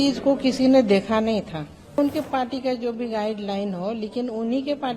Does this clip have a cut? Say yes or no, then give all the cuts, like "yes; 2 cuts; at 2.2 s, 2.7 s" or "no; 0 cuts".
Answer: yes; 1 cut; at 2.0 s